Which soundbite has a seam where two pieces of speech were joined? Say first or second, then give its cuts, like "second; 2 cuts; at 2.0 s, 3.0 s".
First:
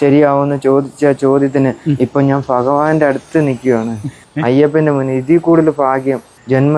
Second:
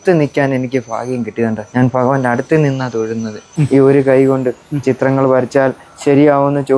second; 2 cuts; at 1.6 s, 3.5 s